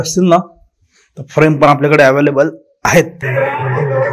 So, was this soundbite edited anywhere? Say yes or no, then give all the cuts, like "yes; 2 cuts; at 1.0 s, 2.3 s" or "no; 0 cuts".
yes; 1 cut; at 3.2 s